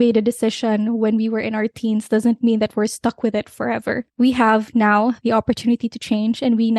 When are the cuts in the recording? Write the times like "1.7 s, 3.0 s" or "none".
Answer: 4.1 s